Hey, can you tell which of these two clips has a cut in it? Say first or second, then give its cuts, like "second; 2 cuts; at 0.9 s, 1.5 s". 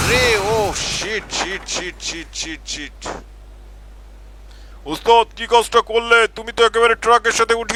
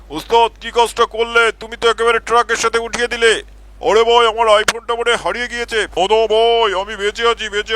second; 1 cut; at 5.9 s